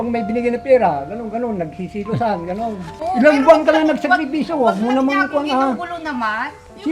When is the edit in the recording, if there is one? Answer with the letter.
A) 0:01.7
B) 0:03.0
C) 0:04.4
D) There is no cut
B